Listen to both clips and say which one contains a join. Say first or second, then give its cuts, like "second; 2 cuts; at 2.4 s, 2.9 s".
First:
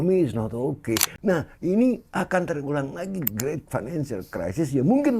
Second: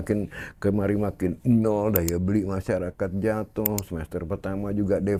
first; 1 cut; at 1.1 s